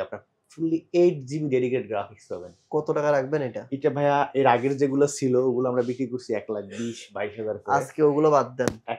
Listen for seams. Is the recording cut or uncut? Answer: uncut